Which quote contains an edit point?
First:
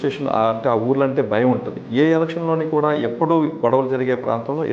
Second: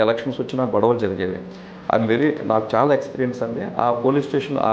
first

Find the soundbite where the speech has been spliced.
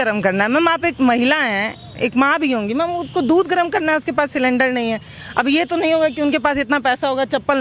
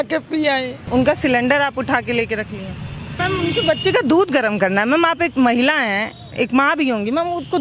second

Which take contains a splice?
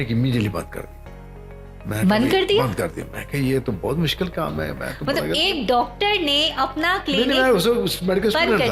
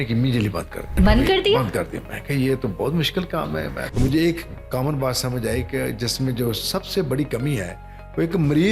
second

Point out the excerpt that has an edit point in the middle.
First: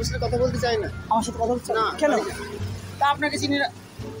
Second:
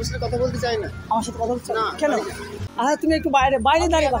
second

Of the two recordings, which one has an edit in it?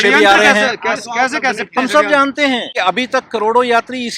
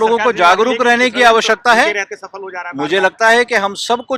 first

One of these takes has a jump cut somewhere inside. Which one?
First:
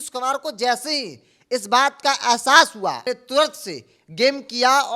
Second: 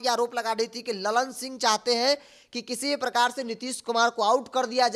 first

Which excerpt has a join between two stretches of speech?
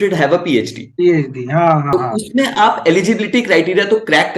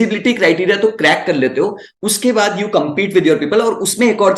first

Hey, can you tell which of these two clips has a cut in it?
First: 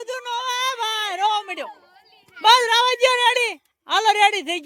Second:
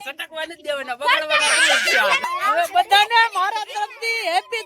second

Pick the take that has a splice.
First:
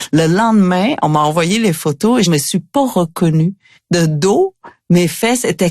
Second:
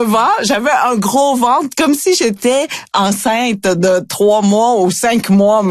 first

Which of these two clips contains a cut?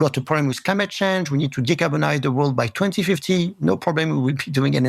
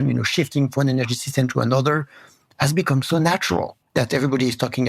second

